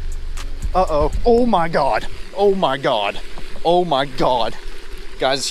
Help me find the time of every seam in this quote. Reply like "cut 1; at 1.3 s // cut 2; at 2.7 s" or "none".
none